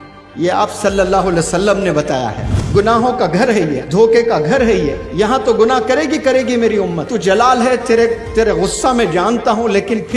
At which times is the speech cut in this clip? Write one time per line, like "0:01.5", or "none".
0:02.5
0:03.8
0:05.0
0:07.1